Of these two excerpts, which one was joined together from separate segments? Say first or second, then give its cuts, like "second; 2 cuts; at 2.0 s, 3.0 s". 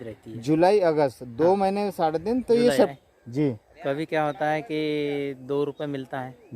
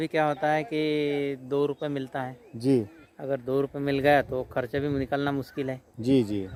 first; 1 cut; at 2.9 s